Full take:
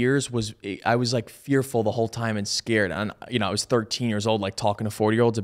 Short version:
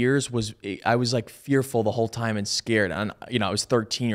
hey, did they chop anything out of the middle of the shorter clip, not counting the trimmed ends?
no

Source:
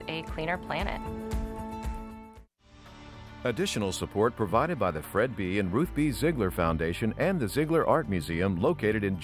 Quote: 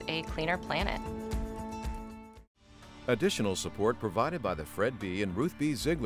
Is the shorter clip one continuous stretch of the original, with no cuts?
no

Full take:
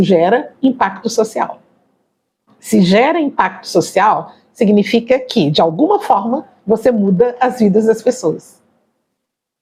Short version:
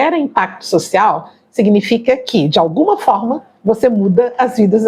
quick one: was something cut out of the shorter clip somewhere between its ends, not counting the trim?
no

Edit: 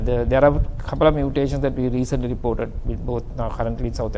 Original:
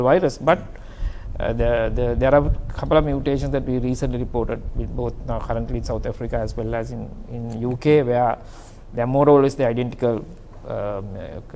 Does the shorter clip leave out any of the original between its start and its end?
no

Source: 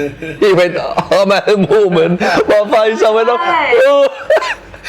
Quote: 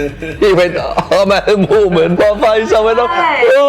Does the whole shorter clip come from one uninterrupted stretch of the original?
no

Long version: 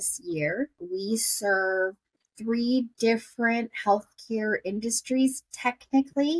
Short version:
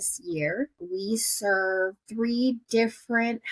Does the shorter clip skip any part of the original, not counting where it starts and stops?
yes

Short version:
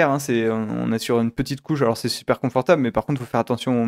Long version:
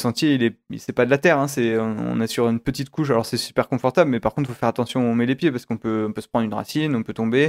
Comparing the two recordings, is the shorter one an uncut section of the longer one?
yes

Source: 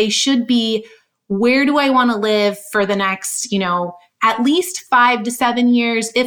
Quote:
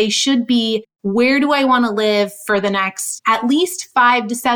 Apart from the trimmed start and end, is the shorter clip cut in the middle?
yes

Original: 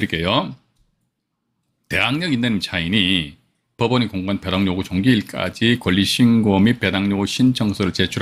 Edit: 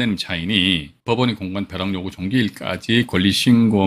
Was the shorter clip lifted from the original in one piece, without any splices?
no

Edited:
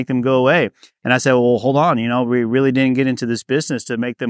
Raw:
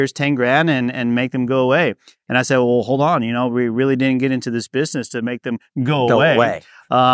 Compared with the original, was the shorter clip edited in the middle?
no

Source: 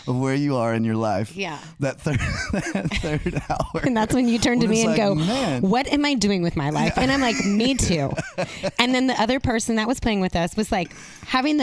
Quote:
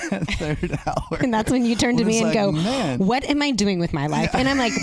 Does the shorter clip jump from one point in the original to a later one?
no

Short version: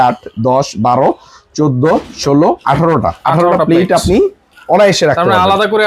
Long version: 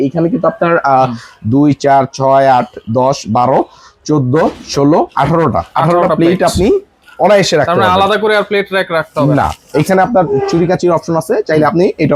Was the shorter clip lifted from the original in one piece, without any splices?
yes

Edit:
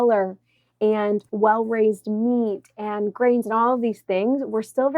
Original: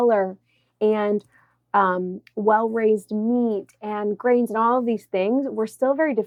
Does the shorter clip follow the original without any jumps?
no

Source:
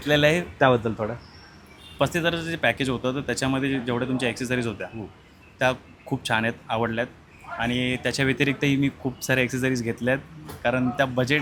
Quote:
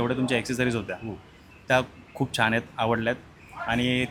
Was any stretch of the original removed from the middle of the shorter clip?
no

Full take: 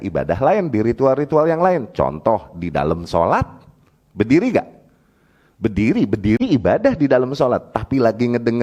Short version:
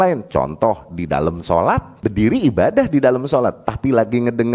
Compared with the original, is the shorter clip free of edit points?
no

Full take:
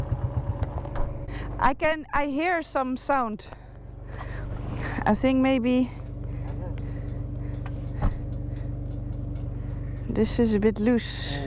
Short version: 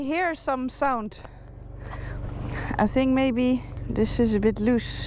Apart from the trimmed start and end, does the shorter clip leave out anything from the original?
yes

